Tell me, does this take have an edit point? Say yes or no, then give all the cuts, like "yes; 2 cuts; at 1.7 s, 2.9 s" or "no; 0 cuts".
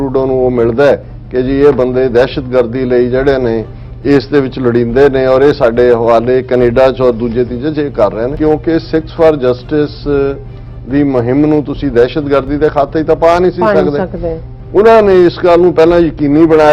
yes; 1 cut; at 8.3 s